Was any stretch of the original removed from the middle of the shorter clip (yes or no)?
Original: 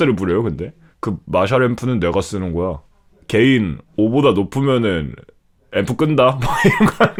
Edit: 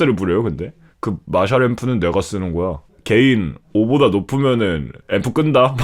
yes